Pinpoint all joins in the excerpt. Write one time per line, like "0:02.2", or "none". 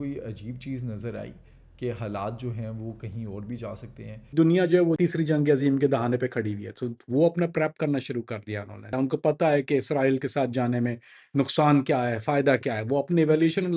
0:04.2
0:05.0
0:08.9